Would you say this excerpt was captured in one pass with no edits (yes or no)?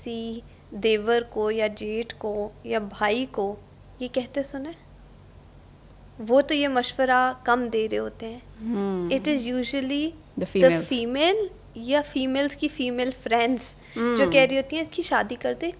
yes